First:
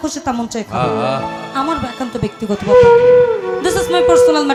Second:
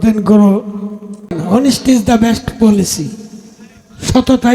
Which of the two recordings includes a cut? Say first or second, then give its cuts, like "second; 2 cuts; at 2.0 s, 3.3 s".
second; 1 cut; at 1.4 s